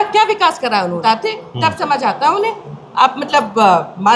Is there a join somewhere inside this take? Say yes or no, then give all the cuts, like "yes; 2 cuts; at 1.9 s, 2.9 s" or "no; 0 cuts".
yes; 1 cut; at 1.0 s